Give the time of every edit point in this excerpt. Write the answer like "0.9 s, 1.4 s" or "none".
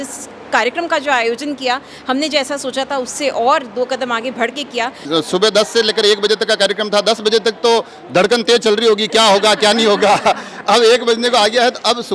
5.0 s